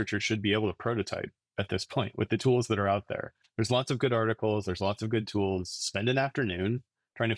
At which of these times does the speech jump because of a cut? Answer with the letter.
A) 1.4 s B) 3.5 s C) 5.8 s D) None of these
D